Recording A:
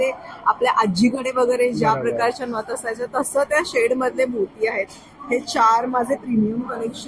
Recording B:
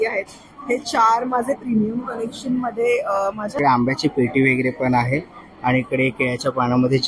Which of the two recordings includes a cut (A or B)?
B